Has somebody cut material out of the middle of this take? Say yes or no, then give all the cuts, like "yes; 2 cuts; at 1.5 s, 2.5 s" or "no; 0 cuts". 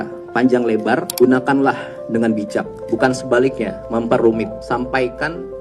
yes; 4 cuts; at 1.1 s, 2.8 s, 3.7 s, 4.6 s